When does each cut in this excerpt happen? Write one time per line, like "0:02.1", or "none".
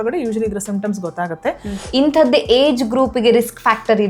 0:01.7